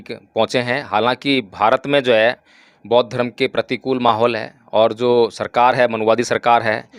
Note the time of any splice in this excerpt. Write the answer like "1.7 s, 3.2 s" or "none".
none